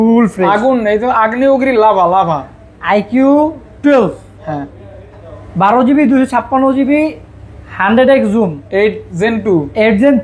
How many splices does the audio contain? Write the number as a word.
zero